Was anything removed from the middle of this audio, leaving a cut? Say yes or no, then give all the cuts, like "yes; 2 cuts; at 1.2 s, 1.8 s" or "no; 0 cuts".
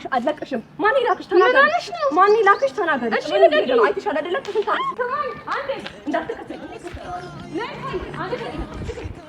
yes; 1 cut; at 4.9 s